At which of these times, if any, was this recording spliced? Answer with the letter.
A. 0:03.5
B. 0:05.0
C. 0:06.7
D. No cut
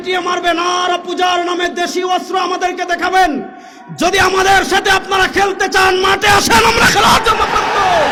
D